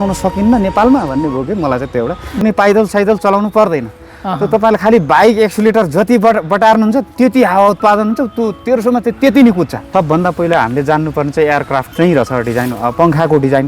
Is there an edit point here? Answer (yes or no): yes